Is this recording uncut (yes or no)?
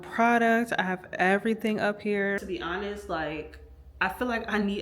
no